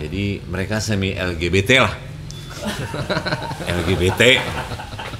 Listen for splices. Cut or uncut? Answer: uncut